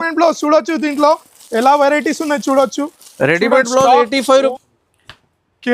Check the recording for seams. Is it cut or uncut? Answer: cut